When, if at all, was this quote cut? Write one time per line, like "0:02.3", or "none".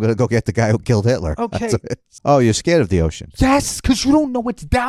0:02.0